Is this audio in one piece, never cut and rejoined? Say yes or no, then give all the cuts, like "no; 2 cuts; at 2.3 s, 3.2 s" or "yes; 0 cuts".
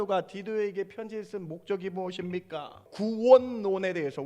no; 1 cut; at 2.8 s